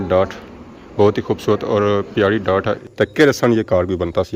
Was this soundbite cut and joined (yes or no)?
yes